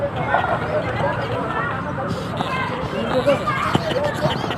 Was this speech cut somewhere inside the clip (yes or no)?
no